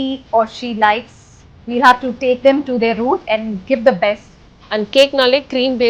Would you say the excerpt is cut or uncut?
cut